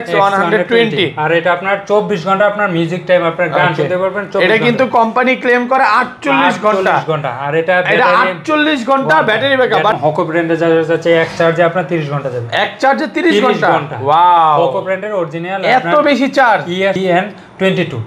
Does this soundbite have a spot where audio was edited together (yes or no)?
yes